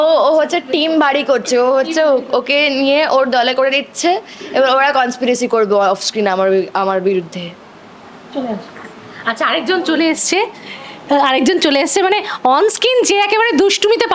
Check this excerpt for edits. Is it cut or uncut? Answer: uncut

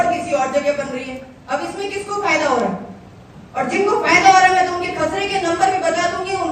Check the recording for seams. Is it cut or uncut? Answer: uncut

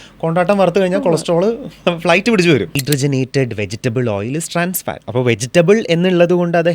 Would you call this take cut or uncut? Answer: cut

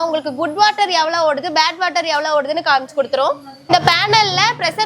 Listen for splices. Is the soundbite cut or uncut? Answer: uncut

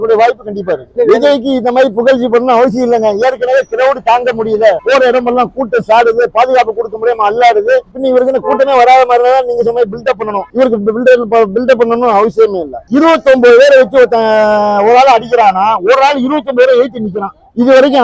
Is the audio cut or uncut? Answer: cut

